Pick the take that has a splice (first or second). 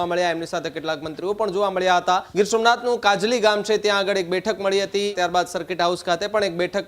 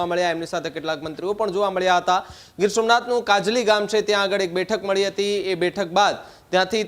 first